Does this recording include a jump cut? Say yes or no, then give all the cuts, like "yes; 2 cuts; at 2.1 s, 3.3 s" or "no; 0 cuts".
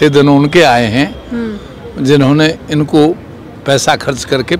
no; 0 cuts